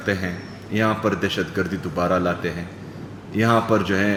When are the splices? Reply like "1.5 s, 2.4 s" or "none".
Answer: none